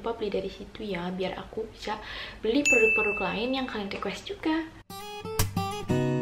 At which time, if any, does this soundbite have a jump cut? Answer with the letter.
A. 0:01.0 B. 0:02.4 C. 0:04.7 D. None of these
C